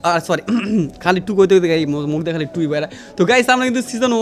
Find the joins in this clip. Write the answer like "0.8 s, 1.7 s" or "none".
none